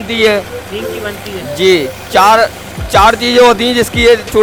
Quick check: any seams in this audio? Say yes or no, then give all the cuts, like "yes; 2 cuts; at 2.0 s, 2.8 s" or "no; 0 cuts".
no; 0 cuts